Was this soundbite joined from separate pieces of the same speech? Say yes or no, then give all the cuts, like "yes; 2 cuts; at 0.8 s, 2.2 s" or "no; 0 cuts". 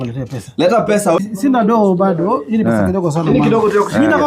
yes; 1 cut; at 1.2 s